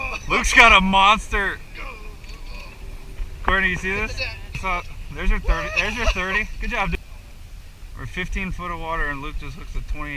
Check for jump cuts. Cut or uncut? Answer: cut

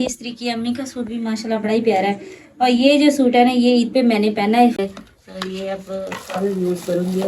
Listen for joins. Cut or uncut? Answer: cut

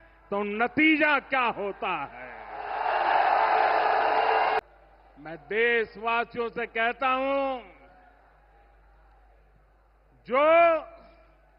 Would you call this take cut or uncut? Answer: uncut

